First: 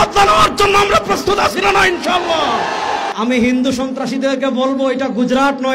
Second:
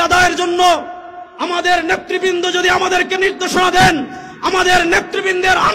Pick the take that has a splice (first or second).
first